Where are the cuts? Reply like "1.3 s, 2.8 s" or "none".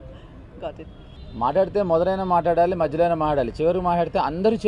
1.1 s